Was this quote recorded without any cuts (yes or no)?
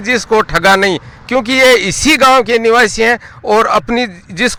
yes